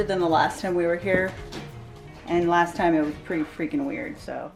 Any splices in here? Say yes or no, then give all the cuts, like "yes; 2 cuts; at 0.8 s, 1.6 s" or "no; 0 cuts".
no; 0 cuts